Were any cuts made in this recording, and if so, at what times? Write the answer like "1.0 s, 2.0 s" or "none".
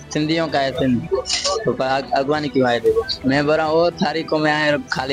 3.1 s